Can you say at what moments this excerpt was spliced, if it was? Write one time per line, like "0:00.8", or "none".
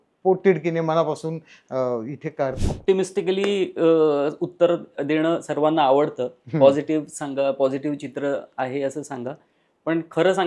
0:02.5